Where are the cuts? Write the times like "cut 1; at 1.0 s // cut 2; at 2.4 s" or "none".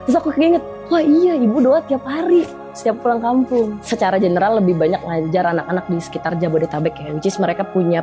cut 1; at 3.8 s // cut 2; at 7.1 s